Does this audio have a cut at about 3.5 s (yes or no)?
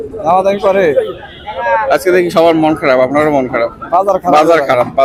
no